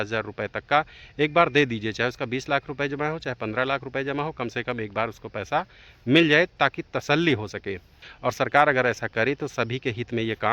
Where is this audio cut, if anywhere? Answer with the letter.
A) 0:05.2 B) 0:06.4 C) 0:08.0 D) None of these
C